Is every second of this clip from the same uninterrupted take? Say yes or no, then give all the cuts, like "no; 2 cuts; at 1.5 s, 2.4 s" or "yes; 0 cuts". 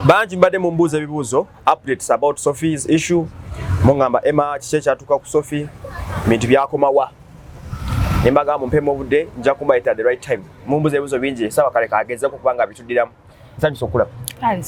yes; 0 cuts